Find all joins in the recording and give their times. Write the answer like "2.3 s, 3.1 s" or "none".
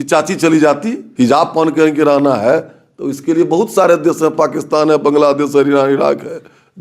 1.0 s